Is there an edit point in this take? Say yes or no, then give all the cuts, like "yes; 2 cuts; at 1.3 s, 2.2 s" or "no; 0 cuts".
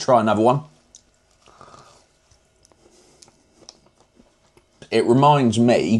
no; 0 cuts